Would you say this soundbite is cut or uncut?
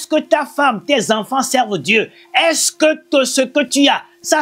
uncut